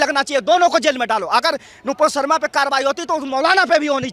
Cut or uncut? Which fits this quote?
uncut